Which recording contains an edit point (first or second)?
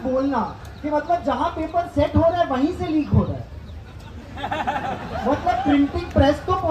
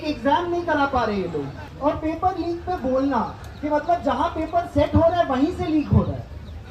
second